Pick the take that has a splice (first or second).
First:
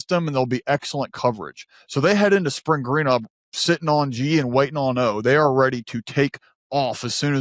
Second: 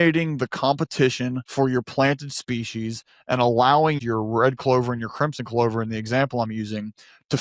second